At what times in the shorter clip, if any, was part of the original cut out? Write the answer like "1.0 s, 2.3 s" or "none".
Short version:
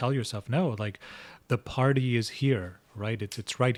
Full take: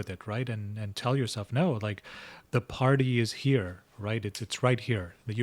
none